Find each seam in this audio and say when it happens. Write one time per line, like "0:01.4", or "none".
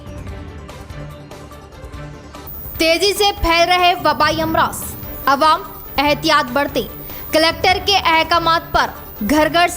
0:00.9